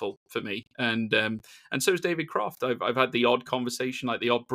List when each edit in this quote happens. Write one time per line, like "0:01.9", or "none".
none